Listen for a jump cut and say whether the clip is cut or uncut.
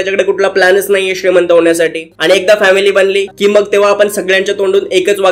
cut